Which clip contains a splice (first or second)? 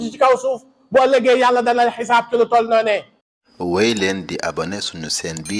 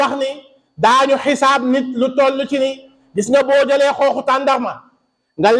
first